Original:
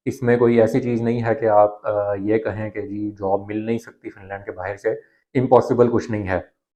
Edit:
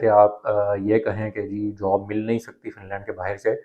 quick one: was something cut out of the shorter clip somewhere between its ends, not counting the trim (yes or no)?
no